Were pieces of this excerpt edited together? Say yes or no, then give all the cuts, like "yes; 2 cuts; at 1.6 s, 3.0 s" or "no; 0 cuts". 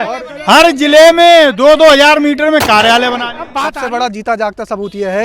yes; 1 cut; at 3.4 s